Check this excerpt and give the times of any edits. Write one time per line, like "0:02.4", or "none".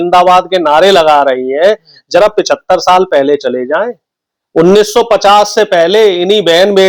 none